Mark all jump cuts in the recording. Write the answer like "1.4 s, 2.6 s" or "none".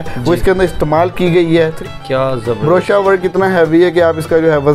1.8 s